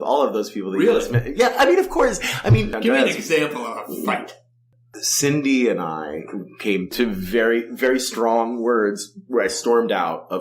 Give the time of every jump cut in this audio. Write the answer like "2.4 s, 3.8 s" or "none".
2.7 s, 4.6 s